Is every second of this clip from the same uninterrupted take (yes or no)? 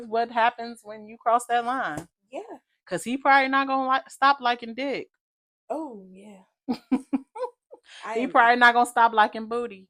yes